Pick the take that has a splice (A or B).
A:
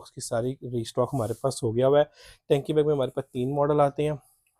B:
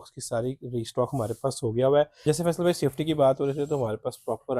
B